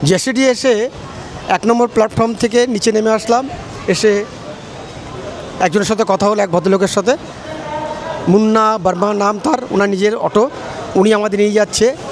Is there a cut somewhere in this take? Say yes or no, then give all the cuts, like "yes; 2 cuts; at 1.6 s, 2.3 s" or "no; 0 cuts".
no; 0 cuts